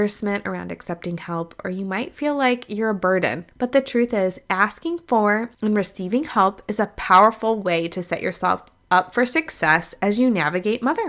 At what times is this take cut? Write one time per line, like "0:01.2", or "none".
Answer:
0:03.4
0:05.5